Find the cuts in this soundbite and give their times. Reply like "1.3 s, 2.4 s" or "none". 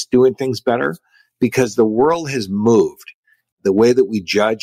none